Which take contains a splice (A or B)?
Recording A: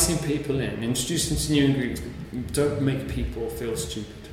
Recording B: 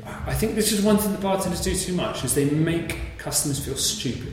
A